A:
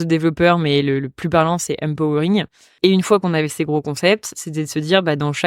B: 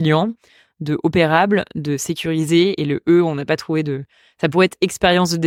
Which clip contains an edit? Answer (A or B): A